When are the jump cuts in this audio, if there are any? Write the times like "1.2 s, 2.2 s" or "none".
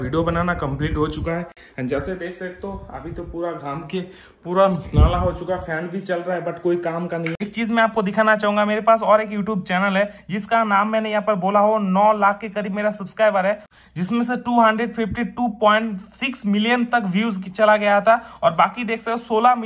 none